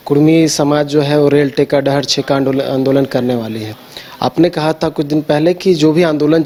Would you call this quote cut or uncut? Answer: uncut